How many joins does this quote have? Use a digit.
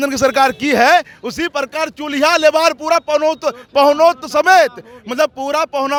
0